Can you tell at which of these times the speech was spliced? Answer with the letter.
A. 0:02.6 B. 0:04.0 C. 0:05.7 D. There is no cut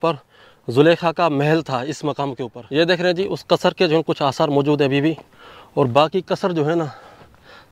A